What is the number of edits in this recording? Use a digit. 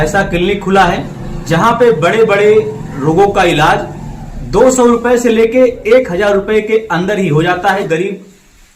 1